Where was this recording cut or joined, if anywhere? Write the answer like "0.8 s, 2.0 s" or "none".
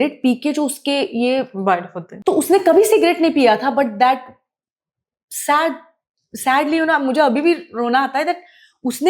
2.0 s